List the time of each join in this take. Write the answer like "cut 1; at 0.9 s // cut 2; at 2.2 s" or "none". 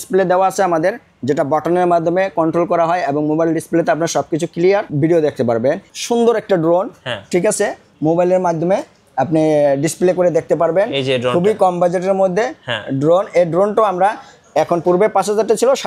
cut 1; at 4.9 s // cut 2; at 5.9 s